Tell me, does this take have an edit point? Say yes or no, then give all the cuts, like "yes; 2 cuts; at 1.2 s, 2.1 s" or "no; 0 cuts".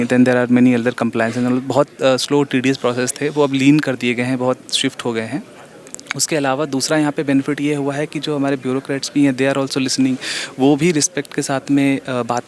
no; 0 cuts